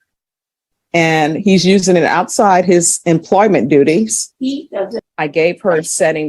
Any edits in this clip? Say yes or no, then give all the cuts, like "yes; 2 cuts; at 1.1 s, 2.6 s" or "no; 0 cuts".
yes; 1 cut; at 5.0 s